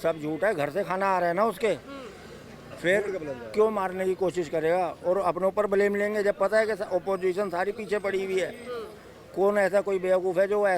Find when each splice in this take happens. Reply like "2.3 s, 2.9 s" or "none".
none